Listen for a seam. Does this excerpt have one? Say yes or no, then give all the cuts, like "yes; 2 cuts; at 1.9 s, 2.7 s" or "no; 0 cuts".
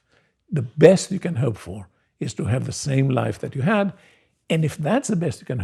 no; 0 cuts